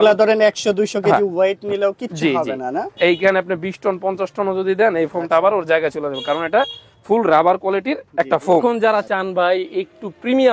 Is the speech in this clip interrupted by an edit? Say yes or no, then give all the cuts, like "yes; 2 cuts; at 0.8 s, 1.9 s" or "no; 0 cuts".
yes; 1 cut; at 8.6 s